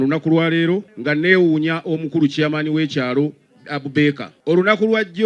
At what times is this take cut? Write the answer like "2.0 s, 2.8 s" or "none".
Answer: 0.9 s, 4.3 s